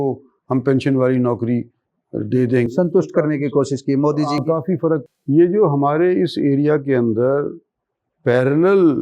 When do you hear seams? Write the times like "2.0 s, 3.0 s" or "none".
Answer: 5.0 s